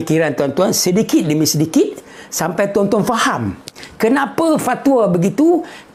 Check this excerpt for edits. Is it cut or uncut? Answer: uncut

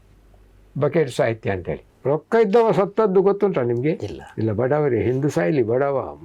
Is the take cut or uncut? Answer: cut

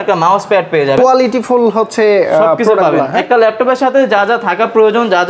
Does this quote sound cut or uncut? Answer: uncut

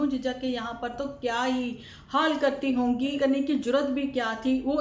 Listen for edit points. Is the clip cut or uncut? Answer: cut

